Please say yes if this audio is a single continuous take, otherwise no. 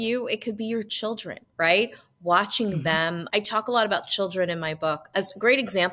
yes